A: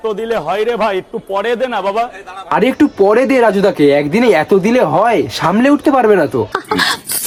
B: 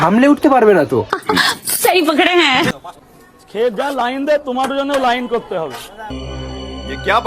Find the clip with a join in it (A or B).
B